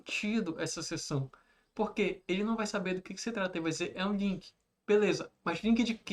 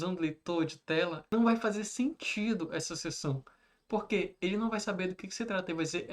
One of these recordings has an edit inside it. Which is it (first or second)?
second